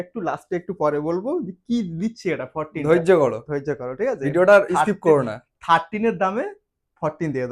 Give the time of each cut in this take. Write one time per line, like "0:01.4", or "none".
none